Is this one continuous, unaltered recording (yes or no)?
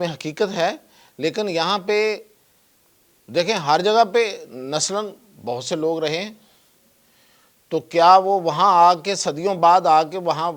yes